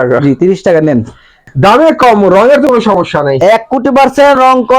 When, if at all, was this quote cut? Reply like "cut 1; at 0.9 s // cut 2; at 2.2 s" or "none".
cut 1; at 1.5 s